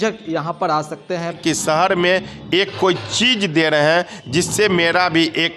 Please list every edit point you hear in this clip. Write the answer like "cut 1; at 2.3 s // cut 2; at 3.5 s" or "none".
cut 1; at 1.4 s